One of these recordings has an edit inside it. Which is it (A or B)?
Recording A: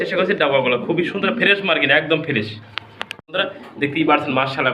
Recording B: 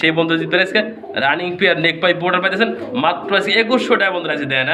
A